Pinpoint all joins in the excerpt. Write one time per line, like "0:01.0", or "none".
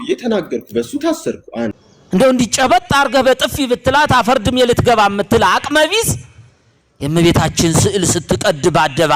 0:01.9